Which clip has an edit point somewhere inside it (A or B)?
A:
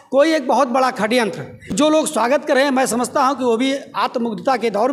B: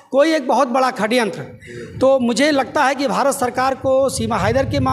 A